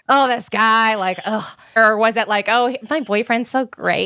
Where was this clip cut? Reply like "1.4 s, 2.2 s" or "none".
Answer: 1.8 s

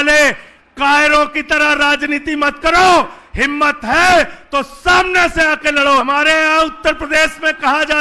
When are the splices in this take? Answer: 6.0 s

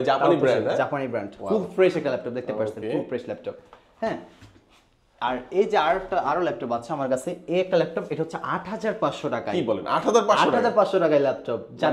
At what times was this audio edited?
none

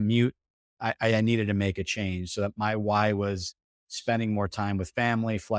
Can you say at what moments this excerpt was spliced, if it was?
none

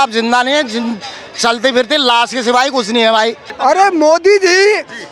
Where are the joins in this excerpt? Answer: 3.4 s

